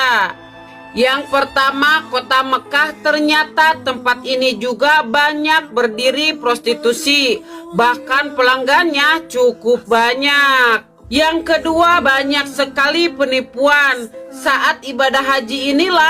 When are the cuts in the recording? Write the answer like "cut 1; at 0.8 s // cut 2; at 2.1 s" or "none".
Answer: cut 1; at 12.0 s